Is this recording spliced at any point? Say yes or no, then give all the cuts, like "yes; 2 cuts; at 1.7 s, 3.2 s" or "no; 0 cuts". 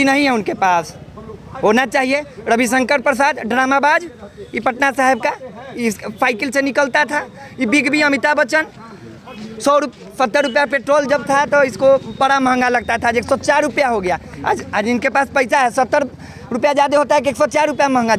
no; 0 cuts